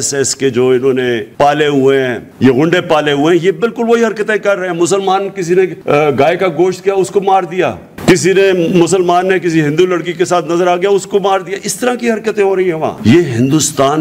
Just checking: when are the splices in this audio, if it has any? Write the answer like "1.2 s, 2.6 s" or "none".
1.3 s, 2.2 s, 5.8 s